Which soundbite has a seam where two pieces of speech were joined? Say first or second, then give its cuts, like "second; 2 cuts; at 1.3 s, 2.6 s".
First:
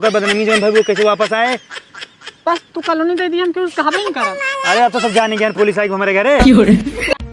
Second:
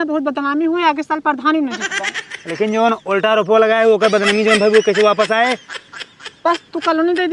first; 1 cut; at 6.4 s